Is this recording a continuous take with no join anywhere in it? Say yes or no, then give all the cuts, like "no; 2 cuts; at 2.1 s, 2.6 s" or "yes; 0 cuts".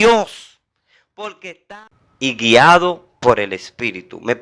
no; 1 cut; at 1.6 s